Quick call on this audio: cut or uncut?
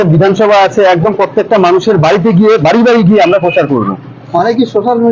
uncut